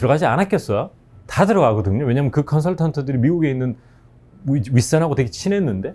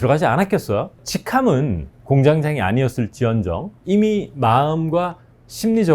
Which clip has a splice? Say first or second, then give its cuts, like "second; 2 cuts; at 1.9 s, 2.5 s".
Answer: second; 2 cuts; at 1.1 s, 3.7 s